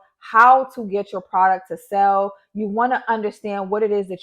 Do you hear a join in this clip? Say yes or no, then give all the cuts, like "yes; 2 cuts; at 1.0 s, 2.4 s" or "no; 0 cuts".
no; 0 cuts